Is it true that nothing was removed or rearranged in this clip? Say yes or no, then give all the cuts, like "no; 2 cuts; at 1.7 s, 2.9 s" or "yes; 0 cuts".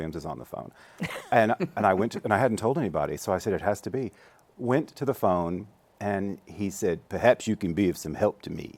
yes; 0 cuts